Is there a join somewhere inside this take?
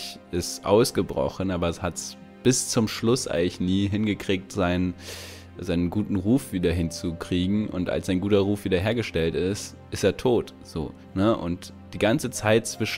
no; 0 cuts

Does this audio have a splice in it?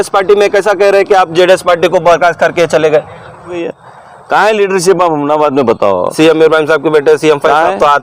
yes; 1 cut; at 3.6 s

